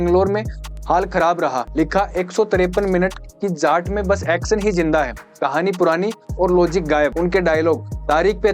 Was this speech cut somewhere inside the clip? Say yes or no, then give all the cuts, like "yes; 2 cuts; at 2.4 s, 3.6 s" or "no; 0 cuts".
yes; 2 cuts; at 1.6 s, 7.1 s